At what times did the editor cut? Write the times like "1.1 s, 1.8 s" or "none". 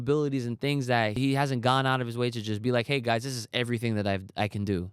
1.2 s